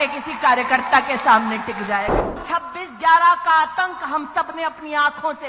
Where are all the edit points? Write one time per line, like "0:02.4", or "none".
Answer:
0:02.4